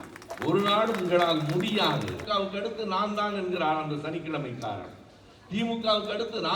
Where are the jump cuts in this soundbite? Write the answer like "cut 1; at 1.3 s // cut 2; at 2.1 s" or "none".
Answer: cut 1; at 2.2 s